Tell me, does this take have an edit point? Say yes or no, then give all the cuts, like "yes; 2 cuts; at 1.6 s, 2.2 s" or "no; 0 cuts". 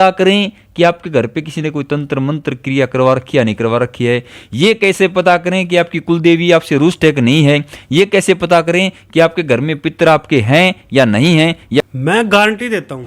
yes; 1 cut; at 11.9 s